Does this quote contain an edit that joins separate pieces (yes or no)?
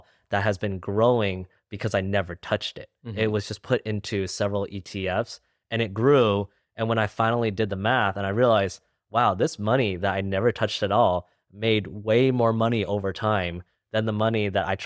no